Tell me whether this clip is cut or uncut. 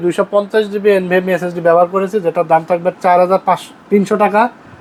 uncut